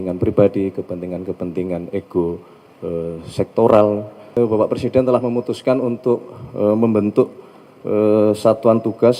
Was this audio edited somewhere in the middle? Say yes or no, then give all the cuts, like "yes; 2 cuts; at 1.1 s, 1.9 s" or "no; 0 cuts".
yes; 1 cut; at 4.2 s